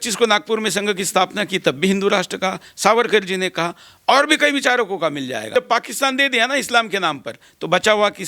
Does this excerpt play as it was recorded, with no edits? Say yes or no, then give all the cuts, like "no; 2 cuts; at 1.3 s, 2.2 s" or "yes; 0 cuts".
no; 1 cut; at 5.5 s